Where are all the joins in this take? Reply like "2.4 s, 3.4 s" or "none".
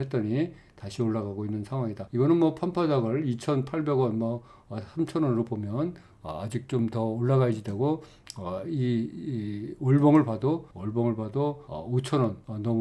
none

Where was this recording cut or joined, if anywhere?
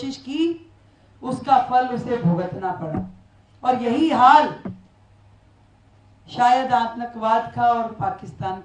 none

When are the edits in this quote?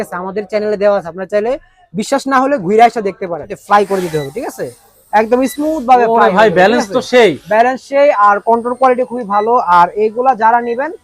3.5 s

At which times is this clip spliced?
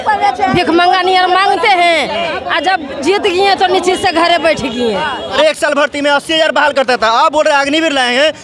5.4 s

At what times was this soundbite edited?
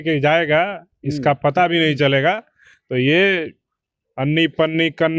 none

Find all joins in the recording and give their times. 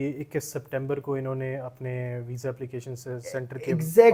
none

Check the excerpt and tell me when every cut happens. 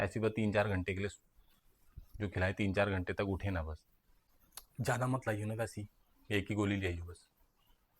4.8 s

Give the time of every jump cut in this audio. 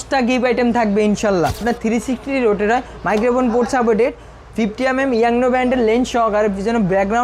1.6 s

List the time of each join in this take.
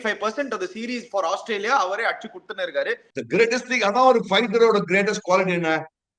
3.1 s

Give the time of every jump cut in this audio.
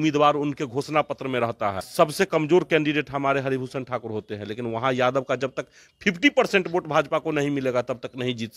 1.8 s

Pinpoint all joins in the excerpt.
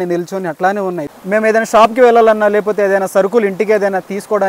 1.1 s

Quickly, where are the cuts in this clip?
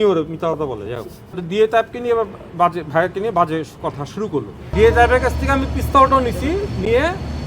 1.4 s, 4.6 s

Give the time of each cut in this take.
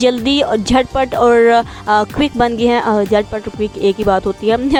none

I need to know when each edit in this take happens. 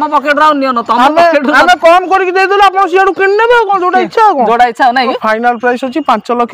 5.2 s

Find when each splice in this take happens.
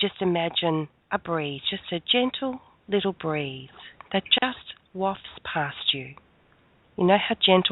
1.0 s

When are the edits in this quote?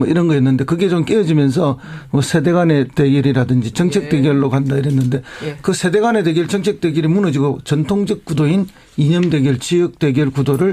7.5 s

